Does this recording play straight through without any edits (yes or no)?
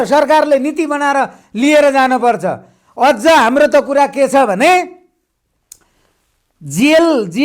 yes